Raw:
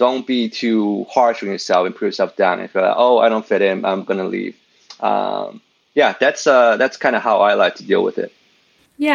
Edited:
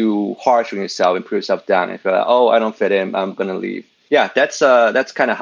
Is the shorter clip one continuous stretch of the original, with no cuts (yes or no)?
no